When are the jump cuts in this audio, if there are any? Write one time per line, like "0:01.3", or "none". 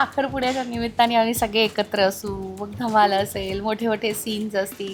none